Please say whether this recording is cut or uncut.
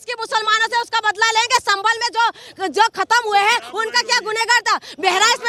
uncut